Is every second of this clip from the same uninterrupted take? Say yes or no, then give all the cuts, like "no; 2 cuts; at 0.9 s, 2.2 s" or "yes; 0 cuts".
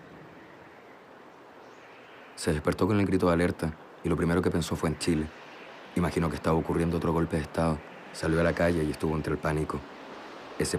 no; 1 cut; at 6.9 s